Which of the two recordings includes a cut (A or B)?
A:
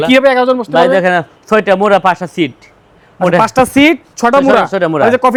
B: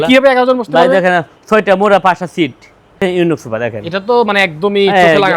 B